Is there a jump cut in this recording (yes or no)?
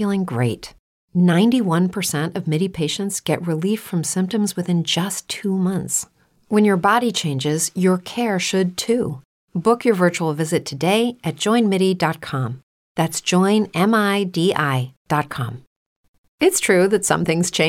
yes